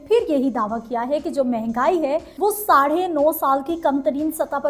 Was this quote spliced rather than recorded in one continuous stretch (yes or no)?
yes